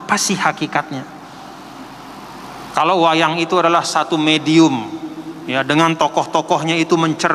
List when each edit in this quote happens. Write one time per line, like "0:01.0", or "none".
none